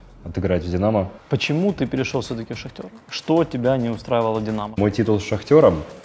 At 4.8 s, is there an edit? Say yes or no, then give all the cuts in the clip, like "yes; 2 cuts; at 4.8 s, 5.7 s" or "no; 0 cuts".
yes; 2 cuts; at 1.2 s, 4.8 s